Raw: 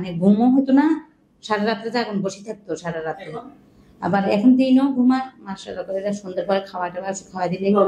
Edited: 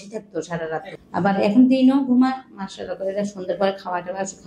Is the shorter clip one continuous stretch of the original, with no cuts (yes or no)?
no